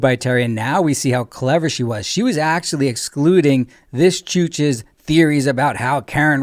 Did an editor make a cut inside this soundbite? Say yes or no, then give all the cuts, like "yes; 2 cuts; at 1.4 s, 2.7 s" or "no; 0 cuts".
no; 0 cuts